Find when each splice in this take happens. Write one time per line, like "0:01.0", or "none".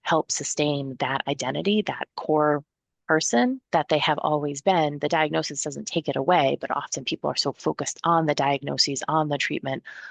0:02.1
0:03.6